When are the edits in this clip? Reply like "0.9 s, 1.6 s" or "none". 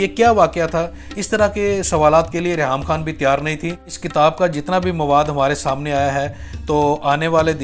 3.9 s